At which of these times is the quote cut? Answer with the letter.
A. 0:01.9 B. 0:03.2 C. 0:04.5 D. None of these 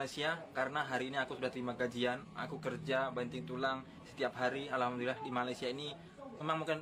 D